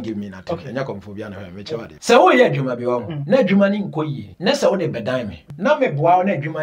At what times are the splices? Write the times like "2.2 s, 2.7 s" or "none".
1.9 s, 3.1 s, 4.2 s, 5.4 s